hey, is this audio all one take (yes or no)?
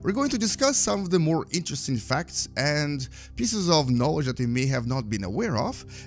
yes